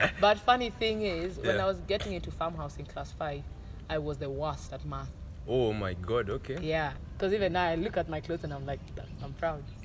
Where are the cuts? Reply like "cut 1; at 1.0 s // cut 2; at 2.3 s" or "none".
cut 1; at 7.0 s